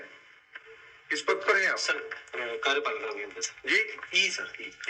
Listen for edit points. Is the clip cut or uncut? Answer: uncut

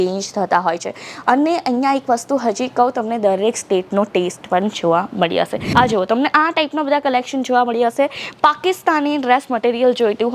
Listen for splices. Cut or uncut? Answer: cut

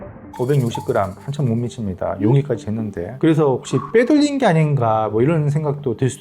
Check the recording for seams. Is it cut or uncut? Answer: cut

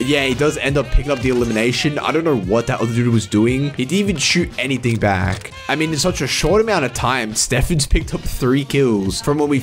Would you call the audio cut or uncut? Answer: uncut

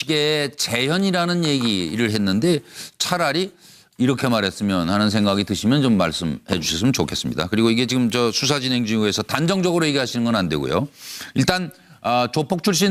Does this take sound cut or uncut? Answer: uncut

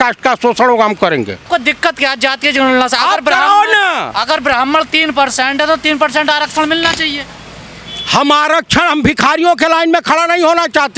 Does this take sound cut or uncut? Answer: cut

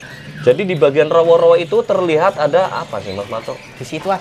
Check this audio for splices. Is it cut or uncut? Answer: uncut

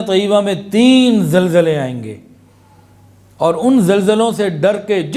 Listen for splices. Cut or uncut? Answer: uncut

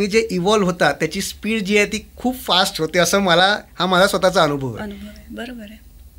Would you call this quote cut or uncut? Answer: uncut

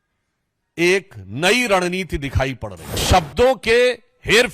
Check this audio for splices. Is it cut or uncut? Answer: cut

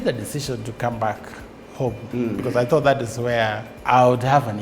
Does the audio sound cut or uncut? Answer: cut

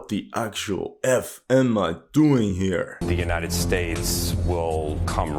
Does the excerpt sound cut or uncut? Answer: cut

